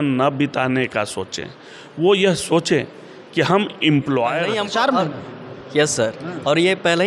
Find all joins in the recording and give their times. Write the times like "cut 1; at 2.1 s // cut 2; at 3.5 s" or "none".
cut 1; at 4.4 s